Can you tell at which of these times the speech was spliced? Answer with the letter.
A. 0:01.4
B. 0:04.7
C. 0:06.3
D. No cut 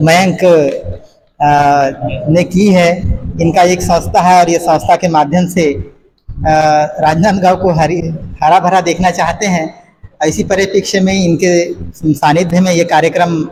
D